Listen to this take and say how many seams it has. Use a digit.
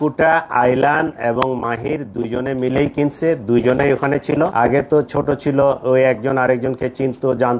1